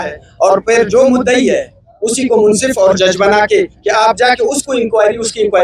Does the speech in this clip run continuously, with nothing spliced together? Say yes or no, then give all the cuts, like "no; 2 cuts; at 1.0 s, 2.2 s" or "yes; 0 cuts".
yes; 0 cuts